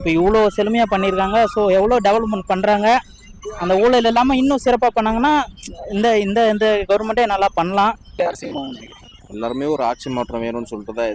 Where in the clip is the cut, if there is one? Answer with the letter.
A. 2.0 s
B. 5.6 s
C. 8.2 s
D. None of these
C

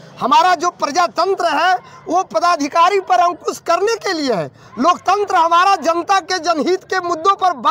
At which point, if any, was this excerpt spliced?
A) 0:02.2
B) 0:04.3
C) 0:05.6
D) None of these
D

